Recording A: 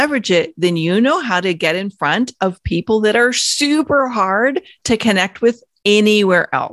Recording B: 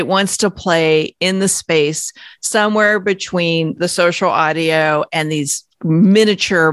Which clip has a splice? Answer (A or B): B